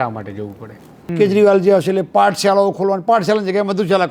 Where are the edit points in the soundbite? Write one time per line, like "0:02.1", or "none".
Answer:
0:01.0